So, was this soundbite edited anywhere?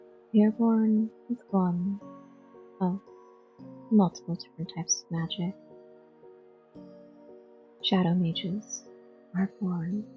no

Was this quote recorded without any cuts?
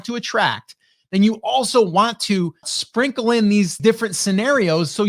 no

